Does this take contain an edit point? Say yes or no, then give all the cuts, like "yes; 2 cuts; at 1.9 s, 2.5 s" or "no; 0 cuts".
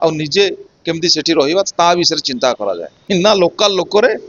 yes; 1 cut; at 2.9 s